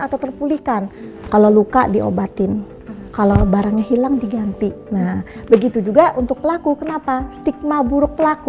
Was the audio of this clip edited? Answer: no; 0 cuts

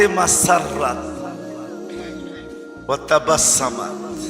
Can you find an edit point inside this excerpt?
yes; 2 cuts; at 1.0 s, 2.8 s

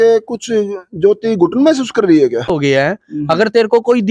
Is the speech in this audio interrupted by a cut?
yes; 1 cut; at 2.5 s

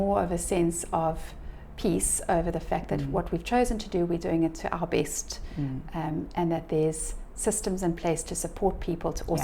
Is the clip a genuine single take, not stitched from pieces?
yes; 0 cuts

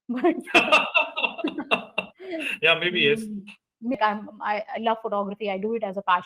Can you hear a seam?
yes; 1 cut; at 3.9 s

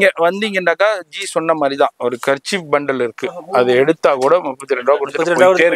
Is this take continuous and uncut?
yes; 0 cuts

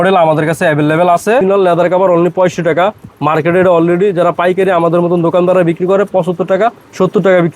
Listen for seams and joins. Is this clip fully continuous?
no; 1 cut; at 1.4 s

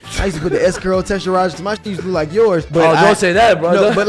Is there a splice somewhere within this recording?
yes; 1 cut; at 2.7 s

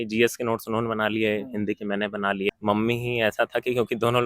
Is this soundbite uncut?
no; 1 cut; at 2.5 s

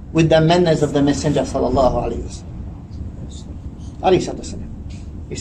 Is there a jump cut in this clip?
no; 0 cuts

